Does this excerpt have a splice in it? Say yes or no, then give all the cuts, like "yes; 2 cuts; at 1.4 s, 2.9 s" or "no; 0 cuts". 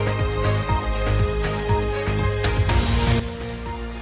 no; 0 cuts